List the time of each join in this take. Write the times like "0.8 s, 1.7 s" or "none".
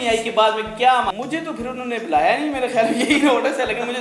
1.1 s